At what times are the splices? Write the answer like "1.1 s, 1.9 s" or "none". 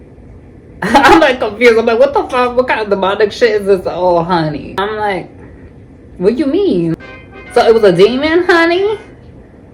4.8 s, 6.9 s

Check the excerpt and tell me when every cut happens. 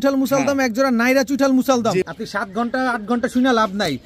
2.1 s

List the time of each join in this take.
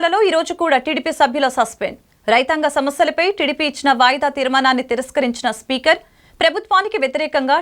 none

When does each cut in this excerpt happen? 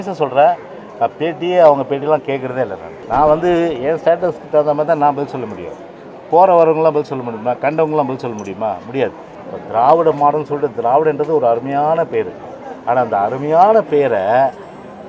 2.9 s, 9.3 s

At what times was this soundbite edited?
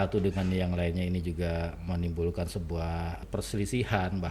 3.2 s

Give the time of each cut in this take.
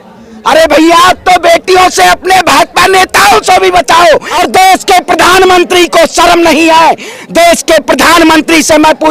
4.3 s

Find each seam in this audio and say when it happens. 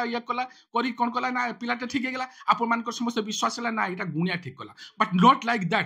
none

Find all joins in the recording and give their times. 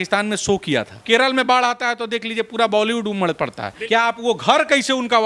1.0 s, 3.7 s

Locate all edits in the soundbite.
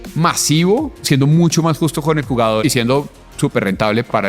1.0 s, 2.6 s

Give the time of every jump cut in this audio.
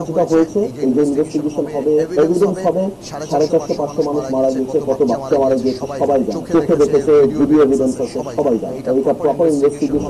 2.1 s, 6.4 s, 8.7 s

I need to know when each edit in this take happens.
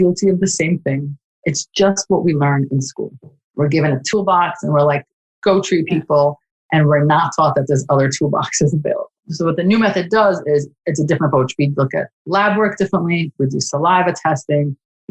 4.0 s

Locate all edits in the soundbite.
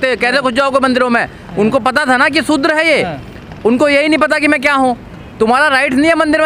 none

